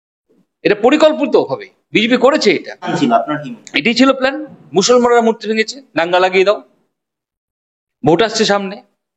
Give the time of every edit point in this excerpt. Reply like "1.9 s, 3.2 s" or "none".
2.9 s